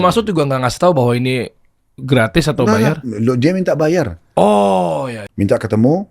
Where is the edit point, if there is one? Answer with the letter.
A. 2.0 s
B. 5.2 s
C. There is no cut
B